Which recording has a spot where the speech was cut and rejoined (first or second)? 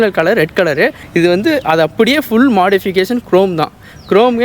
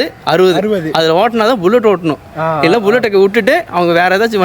first